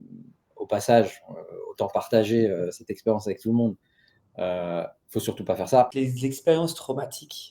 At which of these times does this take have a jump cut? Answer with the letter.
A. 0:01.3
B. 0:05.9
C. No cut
B